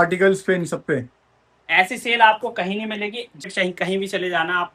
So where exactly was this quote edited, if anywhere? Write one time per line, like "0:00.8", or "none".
0:03.4